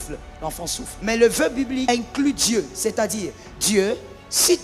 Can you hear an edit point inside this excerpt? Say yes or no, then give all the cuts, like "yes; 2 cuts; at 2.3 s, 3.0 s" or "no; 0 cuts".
yes; 2 cuts; at 0.9 s, 1.9 s